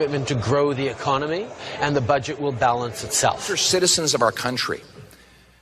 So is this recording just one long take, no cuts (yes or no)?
no